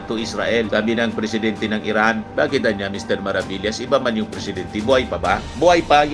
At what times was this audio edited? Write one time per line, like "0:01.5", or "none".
none